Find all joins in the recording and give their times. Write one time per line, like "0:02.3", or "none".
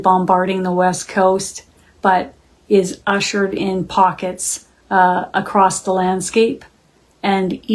none